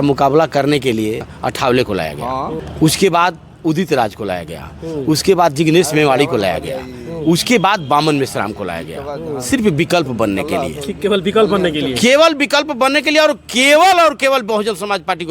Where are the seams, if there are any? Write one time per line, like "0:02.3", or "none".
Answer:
0:01.2
0:02.6